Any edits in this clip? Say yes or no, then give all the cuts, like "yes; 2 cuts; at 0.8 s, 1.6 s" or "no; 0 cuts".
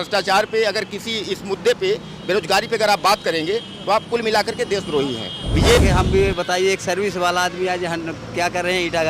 yes; 1 cut; at 5.8 s